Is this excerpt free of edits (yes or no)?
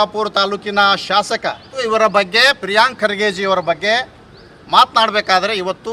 no